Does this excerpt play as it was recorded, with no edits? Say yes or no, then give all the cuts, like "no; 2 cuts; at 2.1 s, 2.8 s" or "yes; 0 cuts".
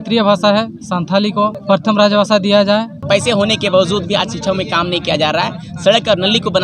no; 2 cuts; at 1.6 s, 3.0 s